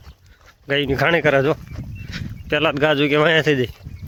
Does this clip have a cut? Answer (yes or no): no